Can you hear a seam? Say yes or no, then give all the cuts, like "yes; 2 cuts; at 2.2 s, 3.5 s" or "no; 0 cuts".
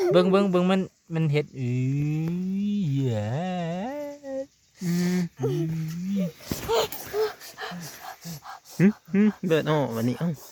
no; 0 cuts